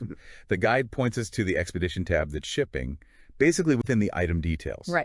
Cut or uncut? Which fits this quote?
cut